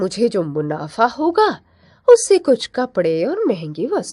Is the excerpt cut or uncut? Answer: uncut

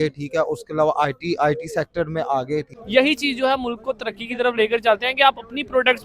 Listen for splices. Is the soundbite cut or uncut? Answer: cut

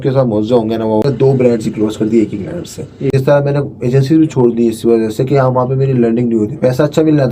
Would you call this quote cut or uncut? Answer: cut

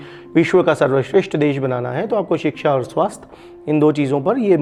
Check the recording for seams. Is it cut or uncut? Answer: uncut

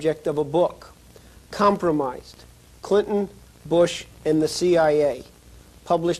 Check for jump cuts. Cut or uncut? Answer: cut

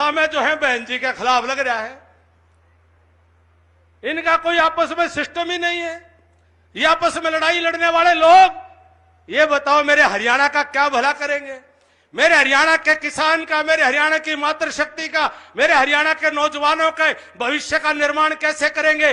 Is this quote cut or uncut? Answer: uncut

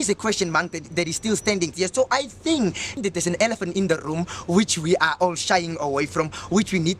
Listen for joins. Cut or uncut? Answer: cut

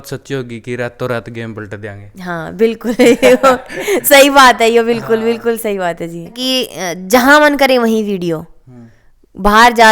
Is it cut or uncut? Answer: cut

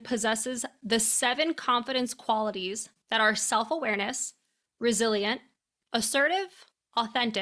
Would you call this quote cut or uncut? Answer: uncut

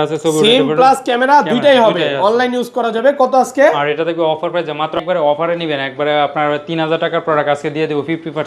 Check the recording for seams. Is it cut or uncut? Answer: cut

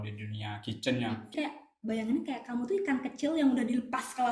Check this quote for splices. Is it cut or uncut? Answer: cut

